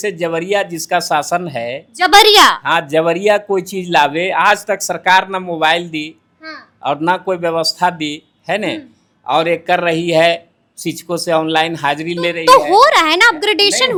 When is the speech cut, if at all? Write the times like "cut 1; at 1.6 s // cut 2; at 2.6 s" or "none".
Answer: none